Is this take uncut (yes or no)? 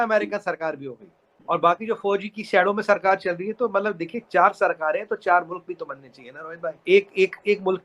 yes